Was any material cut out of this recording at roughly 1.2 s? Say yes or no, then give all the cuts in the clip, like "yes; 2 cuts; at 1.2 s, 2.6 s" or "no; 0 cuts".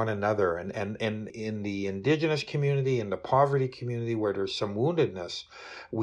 yes; 1 cut; at 1.2 s